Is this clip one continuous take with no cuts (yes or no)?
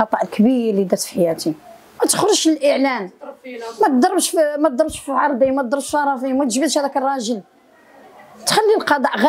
no